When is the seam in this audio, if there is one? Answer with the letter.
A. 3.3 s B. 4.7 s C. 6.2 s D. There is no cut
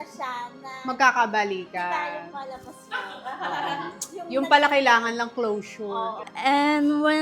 C